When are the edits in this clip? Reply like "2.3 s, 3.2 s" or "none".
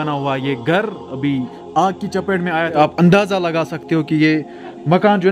2.7 s